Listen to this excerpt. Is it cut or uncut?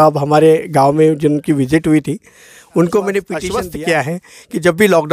cut